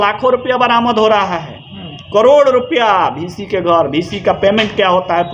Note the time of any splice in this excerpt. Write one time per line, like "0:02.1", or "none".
none